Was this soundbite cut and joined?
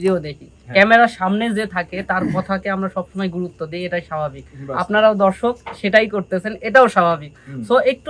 no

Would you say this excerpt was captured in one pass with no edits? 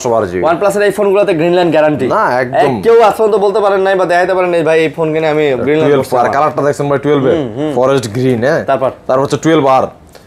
yes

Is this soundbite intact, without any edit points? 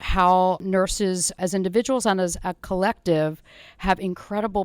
no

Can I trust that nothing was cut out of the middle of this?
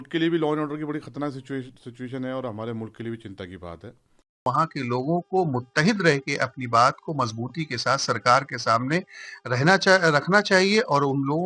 no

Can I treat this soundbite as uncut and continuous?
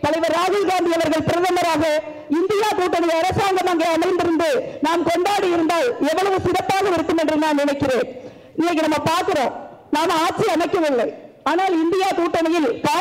yes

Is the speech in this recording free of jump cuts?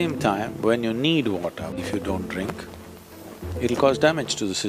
no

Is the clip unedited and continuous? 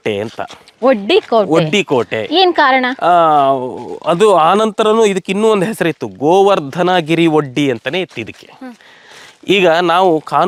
yes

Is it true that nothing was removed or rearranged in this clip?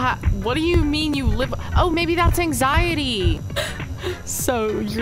no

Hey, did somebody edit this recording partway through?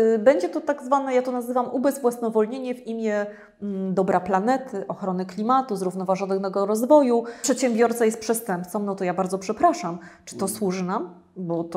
yes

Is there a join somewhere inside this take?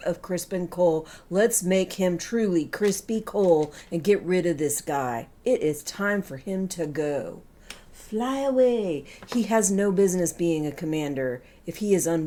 no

